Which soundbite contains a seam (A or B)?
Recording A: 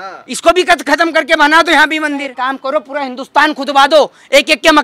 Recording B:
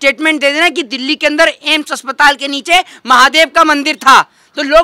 A